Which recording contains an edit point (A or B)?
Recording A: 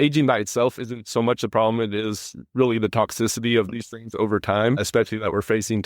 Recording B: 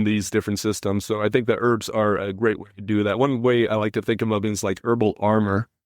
A